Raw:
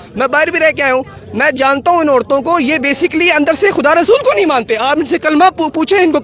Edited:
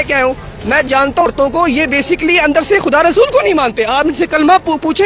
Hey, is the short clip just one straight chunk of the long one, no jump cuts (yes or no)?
no